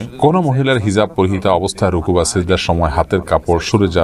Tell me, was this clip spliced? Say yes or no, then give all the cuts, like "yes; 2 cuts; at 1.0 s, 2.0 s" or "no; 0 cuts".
no; 0 cuts